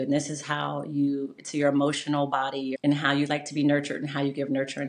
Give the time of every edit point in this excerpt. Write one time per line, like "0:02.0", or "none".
0:02.7

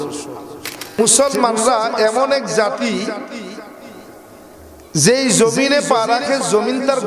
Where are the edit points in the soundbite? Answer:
0:01.0

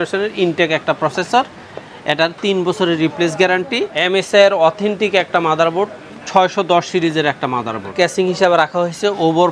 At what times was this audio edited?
0:03.9
0:07.9

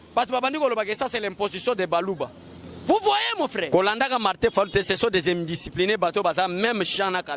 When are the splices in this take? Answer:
0:03.7

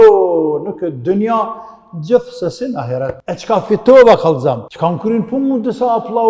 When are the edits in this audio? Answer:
0:03.3
0:04.7

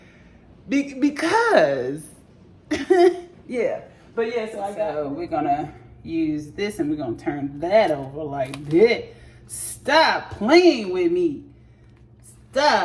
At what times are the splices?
0:04.9

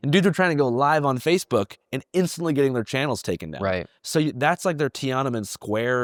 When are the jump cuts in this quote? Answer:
none

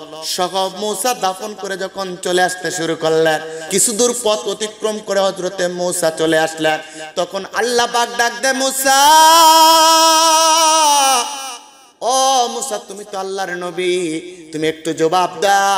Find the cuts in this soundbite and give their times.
0:03.6

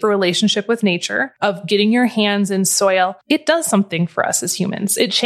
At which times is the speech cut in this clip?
0:01.2
0:03.2

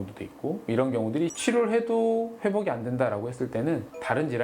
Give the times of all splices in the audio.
0:01.3

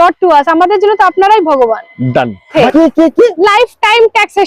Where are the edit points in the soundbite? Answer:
0:02.5

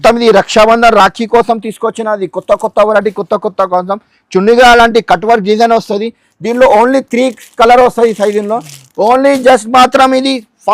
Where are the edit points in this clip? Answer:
none

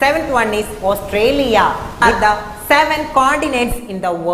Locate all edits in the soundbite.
0:02.0

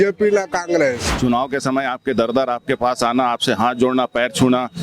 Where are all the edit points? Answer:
0:01.1

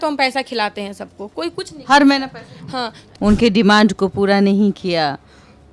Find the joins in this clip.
0:03.0

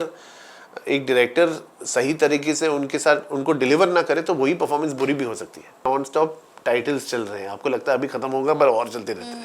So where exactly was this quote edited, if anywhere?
0:05.8

